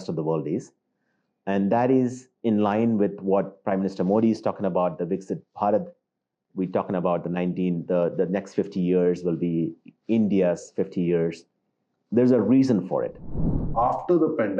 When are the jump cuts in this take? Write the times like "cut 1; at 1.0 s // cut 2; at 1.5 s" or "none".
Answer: cut 1; at 13.6 s